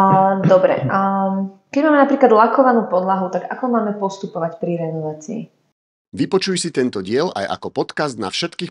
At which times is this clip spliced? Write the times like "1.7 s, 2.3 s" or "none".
6.0 s